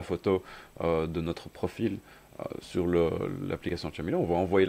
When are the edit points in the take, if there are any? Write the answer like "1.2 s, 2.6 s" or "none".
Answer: none